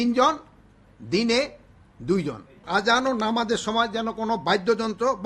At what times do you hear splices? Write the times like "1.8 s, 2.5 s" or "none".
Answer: 2.6 s